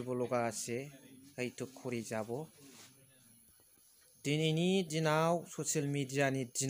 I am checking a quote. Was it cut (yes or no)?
yes